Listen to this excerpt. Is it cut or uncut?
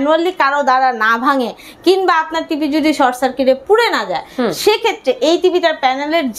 uncut